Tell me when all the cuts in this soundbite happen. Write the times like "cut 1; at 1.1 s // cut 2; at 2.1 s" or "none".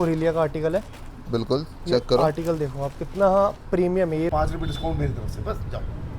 cut 1; at 4.3 s